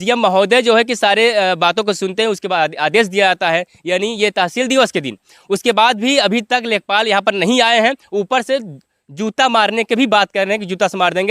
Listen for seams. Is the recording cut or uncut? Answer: uncut